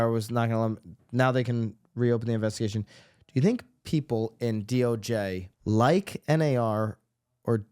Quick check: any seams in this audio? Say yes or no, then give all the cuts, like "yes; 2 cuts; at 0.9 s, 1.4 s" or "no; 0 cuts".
yes; 1 cut; at 5.5 s